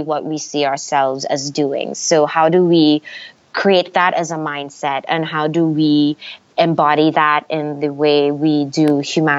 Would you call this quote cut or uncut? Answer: uncut